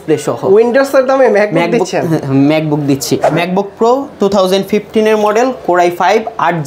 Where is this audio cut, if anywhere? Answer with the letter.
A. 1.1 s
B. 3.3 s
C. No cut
B